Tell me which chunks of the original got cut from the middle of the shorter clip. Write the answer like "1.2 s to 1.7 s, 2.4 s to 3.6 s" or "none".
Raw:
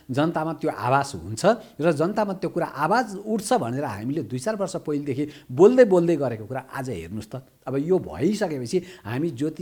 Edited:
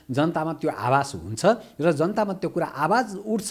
none